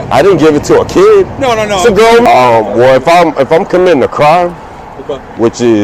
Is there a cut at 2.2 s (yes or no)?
yes